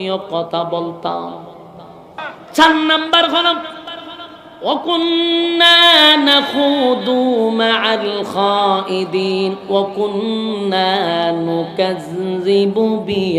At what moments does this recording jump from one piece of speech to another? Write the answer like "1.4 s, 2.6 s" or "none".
2.3 s